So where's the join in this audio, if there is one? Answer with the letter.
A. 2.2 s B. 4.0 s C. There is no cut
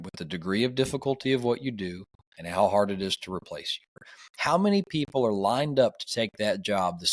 B